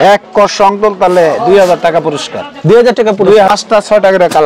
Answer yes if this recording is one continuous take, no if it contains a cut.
no